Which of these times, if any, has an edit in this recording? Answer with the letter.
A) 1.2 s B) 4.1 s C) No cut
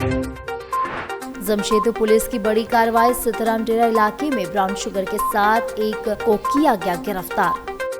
A